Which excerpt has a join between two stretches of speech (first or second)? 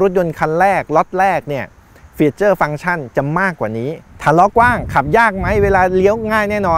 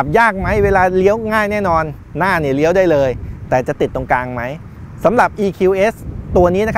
first